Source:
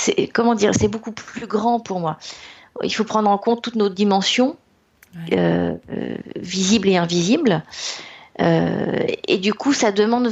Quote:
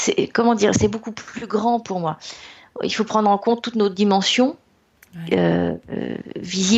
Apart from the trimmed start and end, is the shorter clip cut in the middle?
no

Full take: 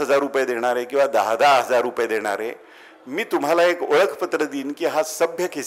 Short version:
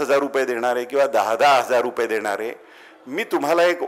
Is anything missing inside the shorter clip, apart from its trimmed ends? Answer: no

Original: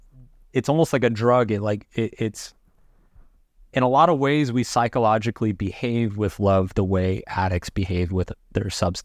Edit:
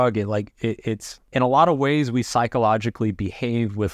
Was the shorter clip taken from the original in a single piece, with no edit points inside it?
no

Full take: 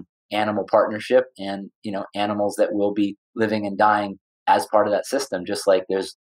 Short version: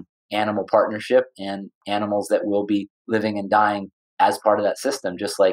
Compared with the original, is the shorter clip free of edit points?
no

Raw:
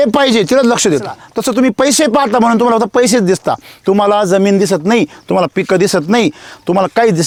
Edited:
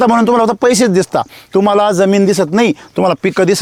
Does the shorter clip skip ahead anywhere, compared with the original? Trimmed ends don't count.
no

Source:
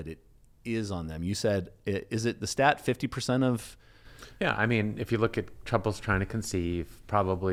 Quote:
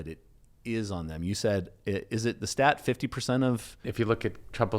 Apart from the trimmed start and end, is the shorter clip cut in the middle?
yes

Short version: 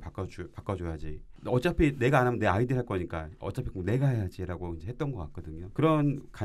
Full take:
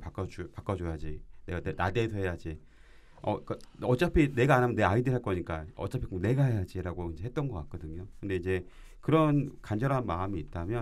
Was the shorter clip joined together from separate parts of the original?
yes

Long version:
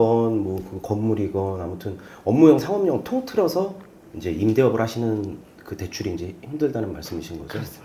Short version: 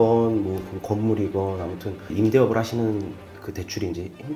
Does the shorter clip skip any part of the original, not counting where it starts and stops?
yes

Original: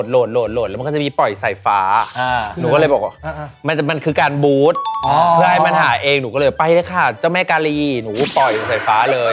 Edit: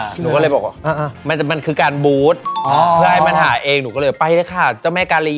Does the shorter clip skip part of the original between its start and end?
no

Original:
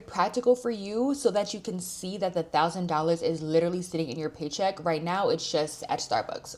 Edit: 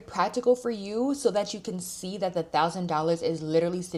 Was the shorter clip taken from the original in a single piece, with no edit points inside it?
yes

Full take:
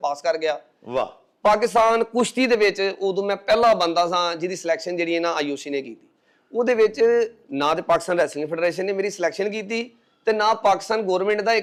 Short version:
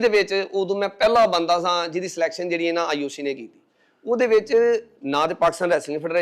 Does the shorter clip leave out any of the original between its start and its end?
no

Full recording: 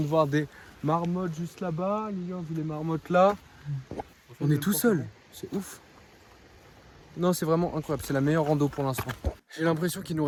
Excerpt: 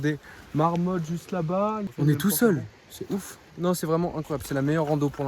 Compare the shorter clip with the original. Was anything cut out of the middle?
yes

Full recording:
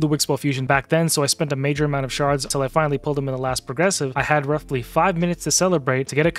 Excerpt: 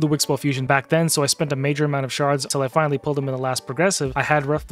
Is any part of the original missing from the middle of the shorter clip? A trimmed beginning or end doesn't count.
no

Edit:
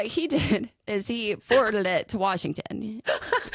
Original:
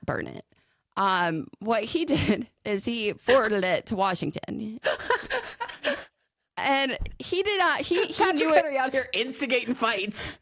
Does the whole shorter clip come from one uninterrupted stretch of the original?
yes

